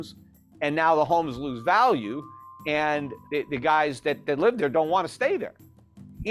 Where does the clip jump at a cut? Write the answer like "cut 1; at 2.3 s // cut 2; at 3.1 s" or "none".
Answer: cut 1; at 3.1 s